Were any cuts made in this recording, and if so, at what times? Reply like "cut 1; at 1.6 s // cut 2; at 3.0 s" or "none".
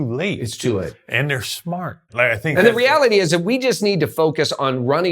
cut 1; at 2.0 s